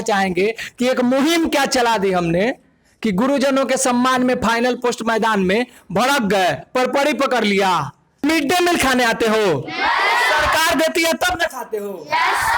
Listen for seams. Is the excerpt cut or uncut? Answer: cut